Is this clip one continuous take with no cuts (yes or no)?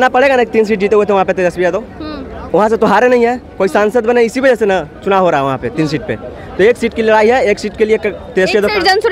yes